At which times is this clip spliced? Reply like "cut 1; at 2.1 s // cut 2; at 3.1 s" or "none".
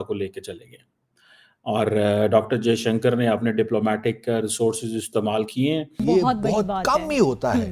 cut 1; at 6.0 s